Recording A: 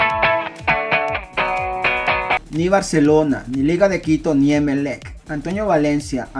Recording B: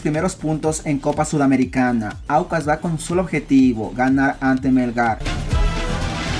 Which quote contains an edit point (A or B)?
B